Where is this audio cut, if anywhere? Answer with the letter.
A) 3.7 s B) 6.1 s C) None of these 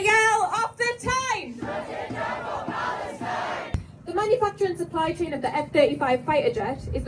A